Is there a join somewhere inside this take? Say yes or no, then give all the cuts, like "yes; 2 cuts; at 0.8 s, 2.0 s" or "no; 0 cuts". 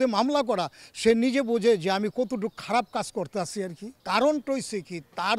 yes; 1 cut; at 3.9 s